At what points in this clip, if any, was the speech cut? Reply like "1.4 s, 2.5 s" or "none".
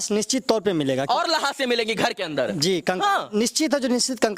none